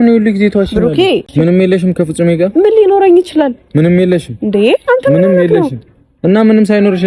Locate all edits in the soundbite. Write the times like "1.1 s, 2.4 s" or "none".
1.3 s